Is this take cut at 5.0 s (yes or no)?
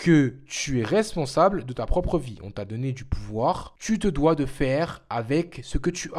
no